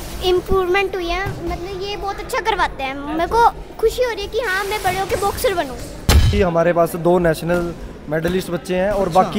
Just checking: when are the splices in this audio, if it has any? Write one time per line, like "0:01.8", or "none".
0:06.3

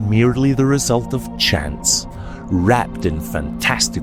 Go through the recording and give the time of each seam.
none

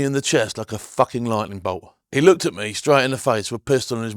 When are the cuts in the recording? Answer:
0:01.9

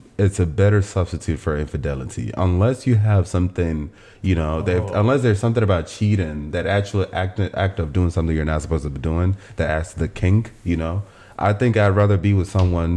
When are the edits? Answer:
none

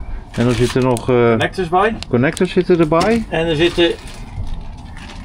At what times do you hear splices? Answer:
none

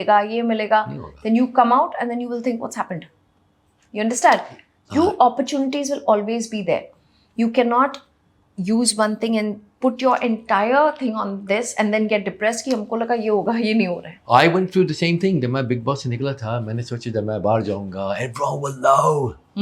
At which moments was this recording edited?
none

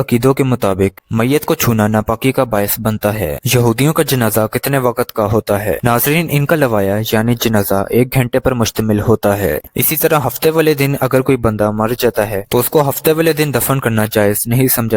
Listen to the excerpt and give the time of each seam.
0:03.4
0:09.6

